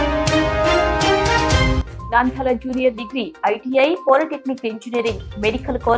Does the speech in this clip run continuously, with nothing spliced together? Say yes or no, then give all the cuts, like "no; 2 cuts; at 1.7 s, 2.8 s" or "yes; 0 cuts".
yes; 0 cuts